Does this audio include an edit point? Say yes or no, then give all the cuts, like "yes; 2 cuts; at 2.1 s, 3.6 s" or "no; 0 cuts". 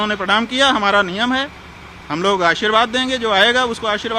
no; 0 cuts